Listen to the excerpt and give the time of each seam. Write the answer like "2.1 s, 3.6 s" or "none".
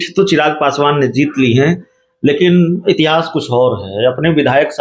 none